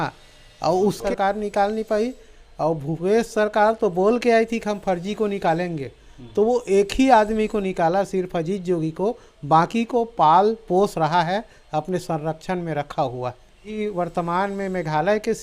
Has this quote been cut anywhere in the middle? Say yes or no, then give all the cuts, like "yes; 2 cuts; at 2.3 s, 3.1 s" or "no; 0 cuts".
yes; 2 cuts; at 1.0 s, 13.7 s